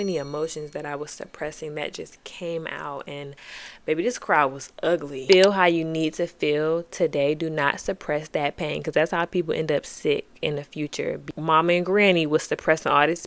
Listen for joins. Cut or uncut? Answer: cut